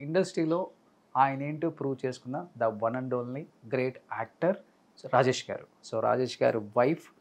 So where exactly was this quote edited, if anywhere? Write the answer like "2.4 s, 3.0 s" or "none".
5.8 s